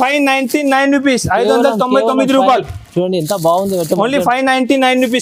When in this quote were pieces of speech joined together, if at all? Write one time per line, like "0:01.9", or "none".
none